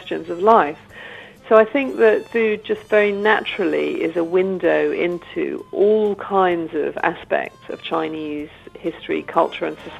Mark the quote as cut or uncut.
uncut